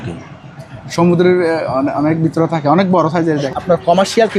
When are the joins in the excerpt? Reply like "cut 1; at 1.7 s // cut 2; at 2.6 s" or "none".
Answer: cut 1; at 3.5 s